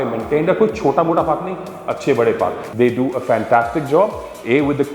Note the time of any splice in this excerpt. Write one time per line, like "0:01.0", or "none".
0:02.6